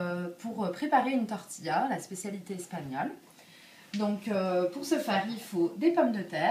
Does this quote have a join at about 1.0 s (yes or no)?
yes